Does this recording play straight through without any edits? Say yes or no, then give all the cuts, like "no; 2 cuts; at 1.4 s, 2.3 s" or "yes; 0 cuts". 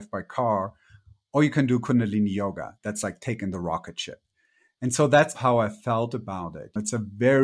no; 2 cuts; at 5.4 s, 6.8 s